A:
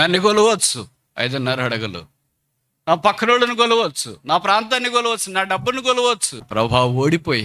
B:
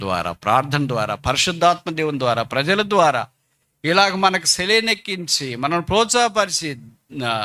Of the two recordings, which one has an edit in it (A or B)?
A